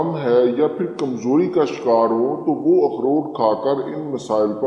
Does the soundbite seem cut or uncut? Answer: uncut